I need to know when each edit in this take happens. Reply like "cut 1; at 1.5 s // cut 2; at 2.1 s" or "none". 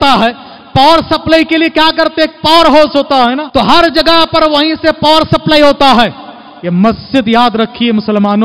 cut 1; at 3.4 s